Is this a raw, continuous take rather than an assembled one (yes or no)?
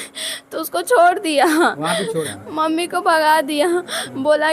no